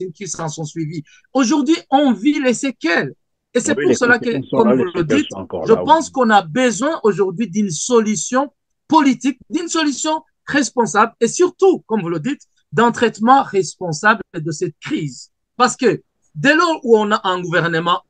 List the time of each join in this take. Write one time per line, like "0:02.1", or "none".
0:15.4